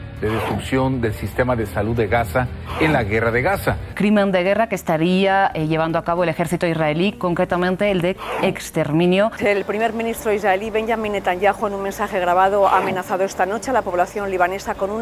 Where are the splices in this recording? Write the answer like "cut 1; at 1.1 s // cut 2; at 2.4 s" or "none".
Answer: cut 1; at 3.9 s // cut 2; at 9.4 s